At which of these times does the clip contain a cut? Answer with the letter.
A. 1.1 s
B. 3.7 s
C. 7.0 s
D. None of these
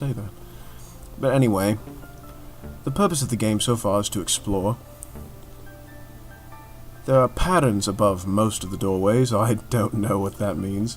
A